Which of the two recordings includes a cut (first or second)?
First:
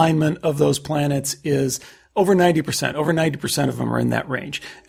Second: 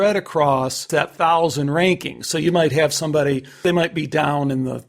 second